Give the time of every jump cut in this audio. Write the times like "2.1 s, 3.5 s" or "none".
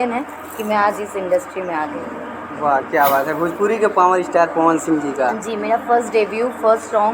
none